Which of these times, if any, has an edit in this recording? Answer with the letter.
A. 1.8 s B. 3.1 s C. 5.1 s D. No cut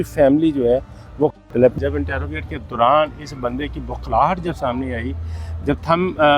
A